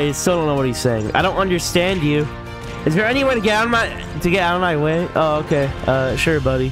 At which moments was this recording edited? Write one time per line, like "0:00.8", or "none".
none